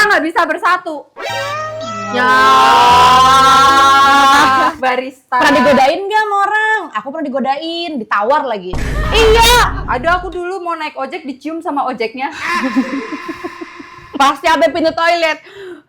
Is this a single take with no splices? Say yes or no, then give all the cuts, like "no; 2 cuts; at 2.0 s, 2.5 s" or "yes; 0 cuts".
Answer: no; 3 cuts; at 4.8 s, 9.8 s, 14.1 s